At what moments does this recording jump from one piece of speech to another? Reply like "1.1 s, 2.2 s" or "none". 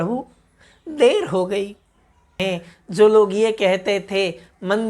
2.4 s

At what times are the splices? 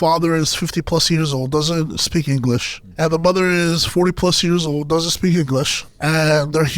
2.8 s, 5.8 s

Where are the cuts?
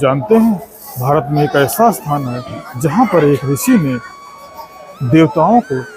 none

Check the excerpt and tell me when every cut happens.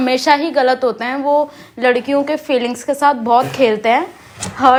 none

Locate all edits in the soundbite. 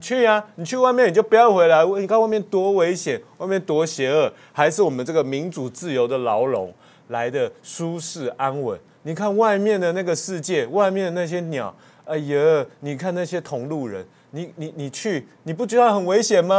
none

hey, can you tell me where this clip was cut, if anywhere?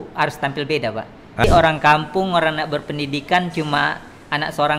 1.4 s

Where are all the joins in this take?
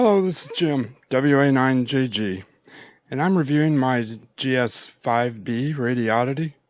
4.2 s

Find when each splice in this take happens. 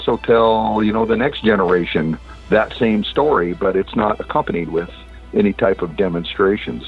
none

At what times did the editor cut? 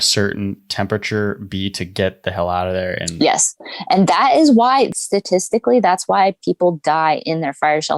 4.9 s

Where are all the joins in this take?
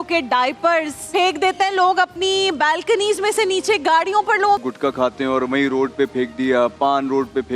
1.0 s, 4.7 s

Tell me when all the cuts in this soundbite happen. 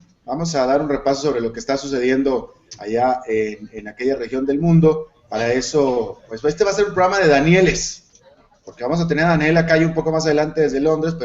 3.8 s

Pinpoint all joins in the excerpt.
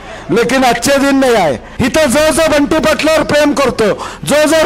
1.7 s

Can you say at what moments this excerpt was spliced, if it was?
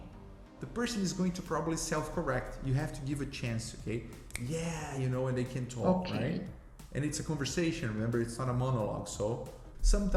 none

